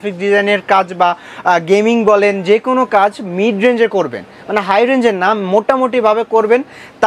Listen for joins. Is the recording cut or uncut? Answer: uncut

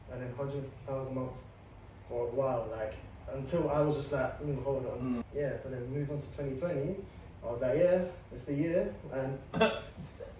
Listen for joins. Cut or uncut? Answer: cut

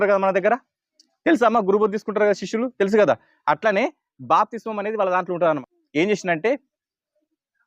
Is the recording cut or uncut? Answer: cut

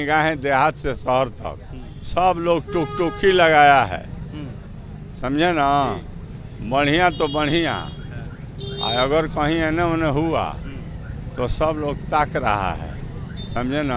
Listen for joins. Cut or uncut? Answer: uncut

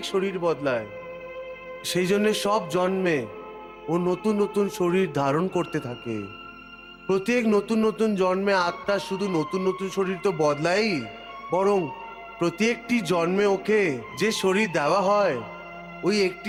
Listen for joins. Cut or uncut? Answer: uncut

